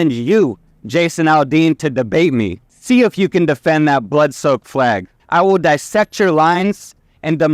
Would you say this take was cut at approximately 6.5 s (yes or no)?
no